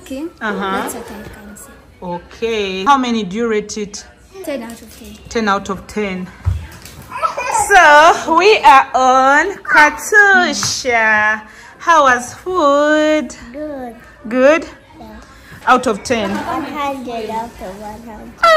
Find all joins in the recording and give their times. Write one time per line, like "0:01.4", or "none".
0:02.9
0:04.4
0:15.5

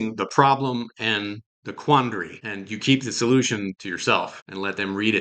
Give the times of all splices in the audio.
none

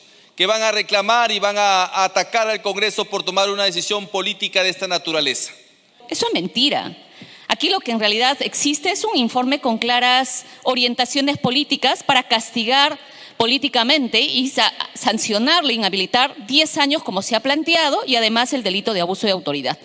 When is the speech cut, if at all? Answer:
0:06.0

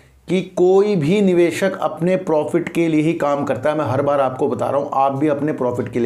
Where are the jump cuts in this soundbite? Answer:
none

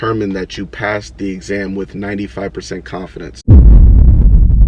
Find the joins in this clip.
0:03.3

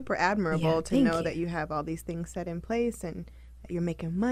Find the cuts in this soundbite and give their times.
none

